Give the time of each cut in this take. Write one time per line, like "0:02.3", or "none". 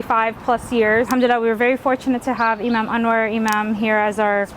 0:01.1